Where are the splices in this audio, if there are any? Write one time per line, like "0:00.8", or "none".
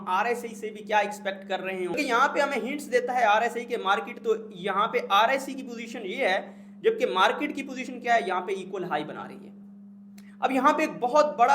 0:02.0